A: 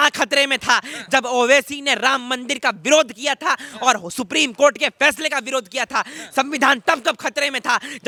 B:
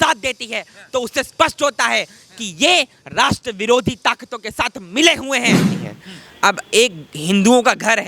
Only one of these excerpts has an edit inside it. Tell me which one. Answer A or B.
B